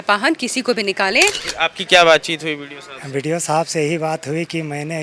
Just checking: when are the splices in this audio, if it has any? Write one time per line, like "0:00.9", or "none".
0:01.4